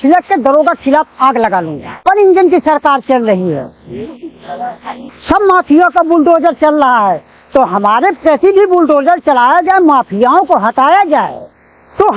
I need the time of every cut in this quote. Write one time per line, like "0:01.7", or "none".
0:02.1